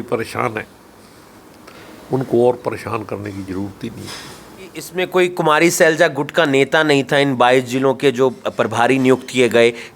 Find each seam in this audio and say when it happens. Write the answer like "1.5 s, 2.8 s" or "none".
4.9 s